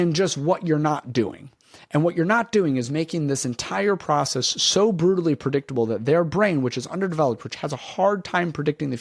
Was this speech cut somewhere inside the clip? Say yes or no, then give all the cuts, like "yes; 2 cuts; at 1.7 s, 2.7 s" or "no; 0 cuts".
no; 0 cuts